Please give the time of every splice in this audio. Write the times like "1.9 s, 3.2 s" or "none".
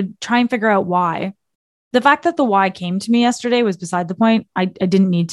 none